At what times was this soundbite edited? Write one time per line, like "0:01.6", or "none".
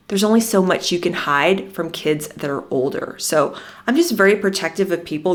none